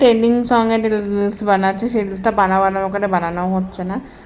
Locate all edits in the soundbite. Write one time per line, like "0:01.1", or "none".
none